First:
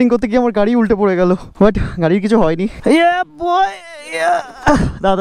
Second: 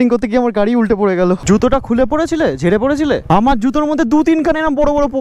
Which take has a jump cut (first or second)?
second